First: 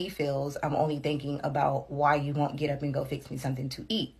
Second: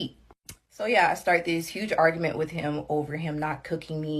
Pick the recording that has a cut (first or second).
first